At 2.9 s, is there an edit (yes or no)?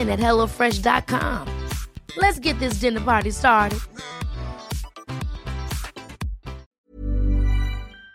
no